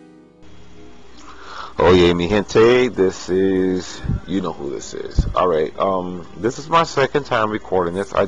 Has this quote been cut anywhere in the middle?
no; 0 cuts

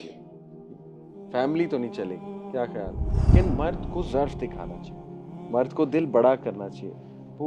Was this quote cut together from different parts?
yes; 1 cut; at 3.3 s

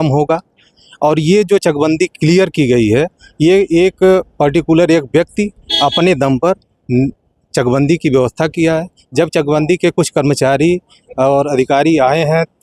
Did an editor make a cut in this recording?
no; 0 cuts

